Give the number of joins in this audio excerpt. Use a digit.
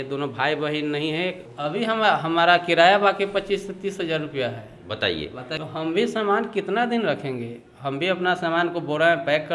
2